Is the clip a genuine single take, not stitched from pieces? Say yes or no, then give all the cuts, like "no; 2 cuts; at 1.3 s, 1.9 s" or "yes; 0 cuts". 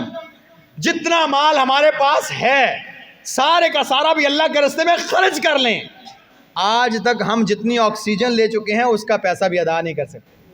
yes; 0 cuts